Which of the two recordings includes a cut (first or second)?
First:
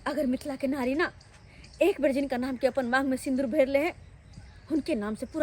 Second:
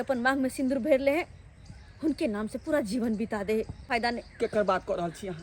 second